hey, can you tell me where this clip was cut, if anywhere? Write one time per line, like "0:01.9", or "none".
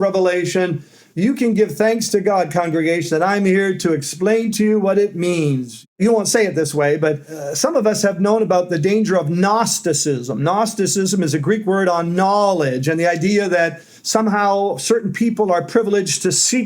0:05.9
0:07.3